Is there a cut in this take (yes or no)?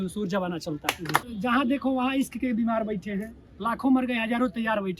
yes